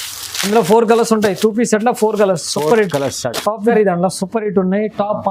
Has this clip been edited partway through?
yes; 1 cut; at 3.7 s

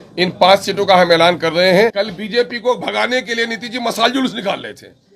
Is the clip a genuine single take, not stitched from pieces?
no; 1 cut; at 1.9 s

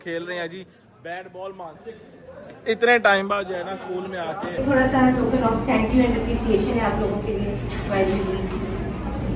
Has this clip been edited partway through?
yes; 2 cuts; at 1.9 s, 4.6 s

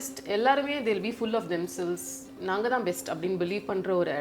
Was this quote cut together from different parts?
yes; 1 cut; at 2.3 s

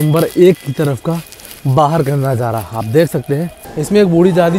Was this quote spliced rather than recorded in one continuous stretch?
yes; 1 cut; at 3.7 s

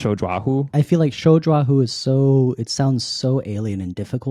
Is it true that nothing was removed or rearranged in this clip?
yes; 0 cuts

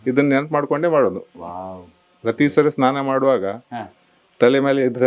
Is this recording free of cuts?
yes; 0 cuts

